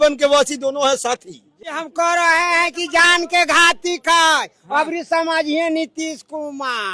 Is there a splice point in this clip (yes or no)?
no